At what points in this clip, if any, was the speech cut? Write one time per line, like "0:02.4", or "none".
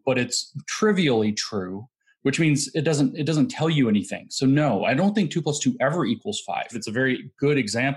0:06.8

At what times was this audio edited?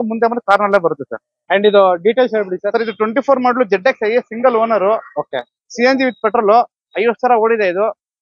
0:01.3

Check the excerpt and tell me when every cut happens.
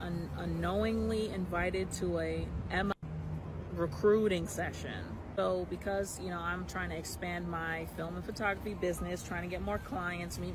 none

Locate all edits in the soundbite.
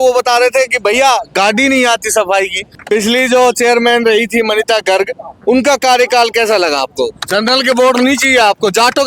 0:02.6
0:07.2

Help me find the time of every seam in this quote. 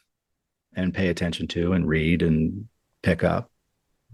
none

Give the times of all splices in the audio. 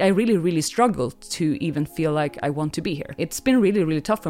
0:03.1

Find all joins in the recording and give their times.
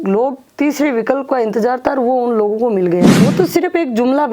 0:03.2

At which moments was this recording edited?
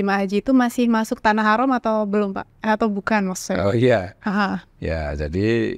none

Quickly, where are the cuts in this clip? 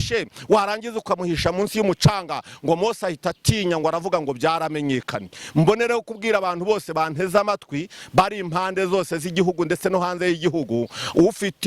none

